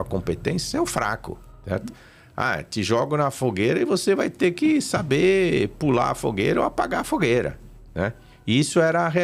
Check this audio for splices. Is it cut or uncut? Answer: uncut